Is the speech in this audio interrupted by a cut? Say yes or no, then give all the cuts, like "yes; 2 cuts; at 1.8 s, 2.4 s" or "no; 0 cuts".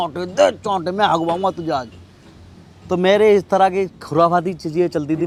no; 0 cuts